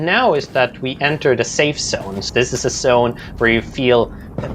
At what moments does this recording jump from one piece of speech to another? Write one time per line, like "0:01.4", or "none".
0:02.2